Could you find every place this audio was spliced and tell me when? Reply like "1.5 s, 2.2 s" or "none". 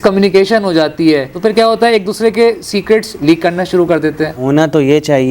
4.4 s